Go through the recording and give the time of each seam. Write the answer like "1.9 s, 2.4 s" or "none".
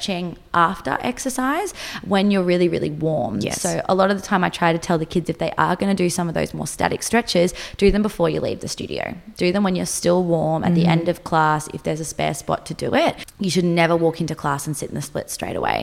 13.3 s